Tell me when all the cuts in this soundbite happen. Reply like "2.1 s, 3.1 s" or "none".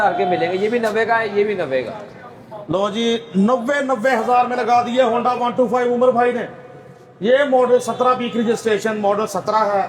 none